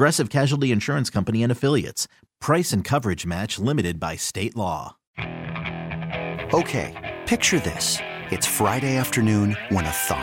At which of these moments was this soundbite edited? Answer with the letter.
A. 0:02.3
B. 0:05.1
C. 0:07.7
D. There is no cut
B